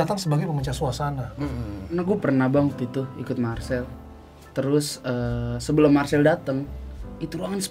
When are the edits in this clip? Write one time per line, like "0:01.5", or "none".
0:02.0